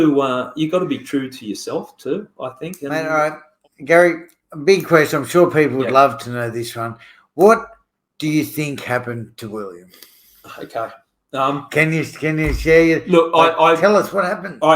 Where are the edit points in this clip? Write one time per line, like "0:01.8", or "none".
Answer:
0:03.0